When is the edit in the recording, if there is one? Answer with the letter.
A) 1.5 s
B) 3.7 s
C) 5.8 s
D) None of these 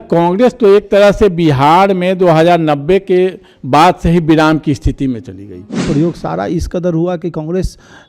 C